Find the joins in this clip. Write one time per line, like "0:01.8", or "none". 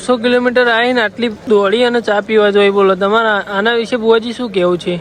0:01.4